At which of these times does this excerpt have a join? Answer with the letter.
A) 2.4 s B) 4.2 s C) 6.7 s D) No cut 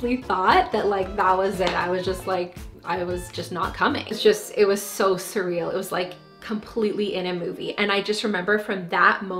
B